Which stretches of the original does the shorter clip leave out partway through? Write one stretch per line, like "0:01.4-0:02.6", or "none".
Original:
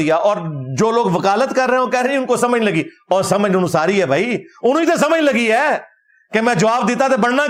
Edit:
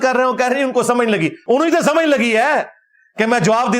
0:02.9-0:04.5